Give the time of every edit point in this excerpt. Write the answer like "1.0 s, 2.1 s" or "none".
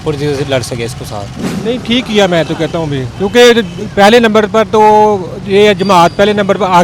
1.4 s